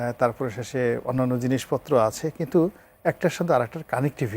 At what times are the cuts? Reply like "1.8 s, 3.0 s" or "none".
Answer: none